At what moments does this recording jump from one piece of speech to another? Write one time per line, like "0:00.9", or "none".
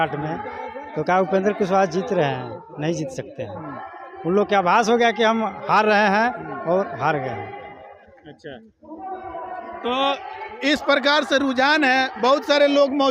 none